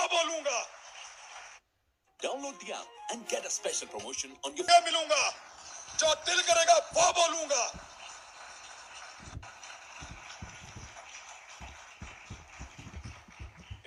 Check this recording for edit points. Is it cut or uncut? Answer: uncut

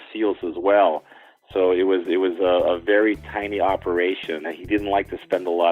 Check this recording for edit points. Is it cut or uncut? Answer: cut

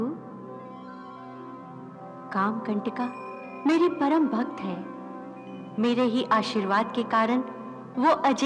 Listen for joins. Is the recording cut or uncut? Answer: cut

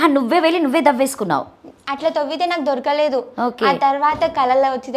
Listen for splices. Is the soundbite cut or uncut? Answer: uncut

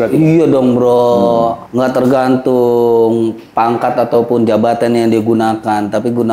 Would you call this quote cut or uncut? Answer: cut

